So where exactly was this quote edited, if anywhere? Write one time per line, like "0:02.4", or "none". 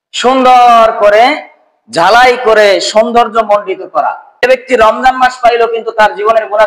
0:04.3